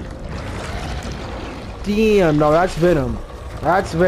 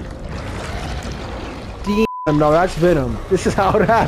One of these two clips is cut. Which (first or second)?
second